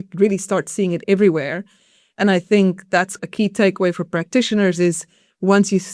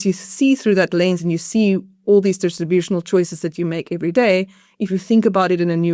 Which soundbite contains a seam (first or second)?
first